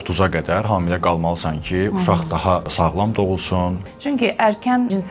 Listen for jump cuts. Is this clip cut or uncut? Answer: cut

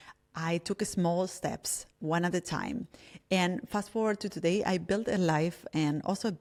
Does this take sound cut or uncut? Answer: uncut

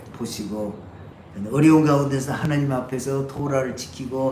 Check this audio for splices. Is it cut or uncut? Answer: cut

